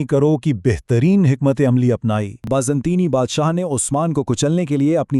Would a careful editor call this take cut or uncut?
cut